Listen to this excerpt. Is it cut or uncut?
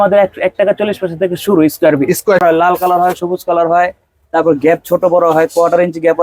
cut